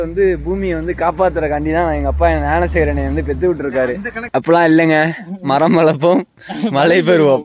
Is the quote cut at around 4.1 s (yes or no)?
yes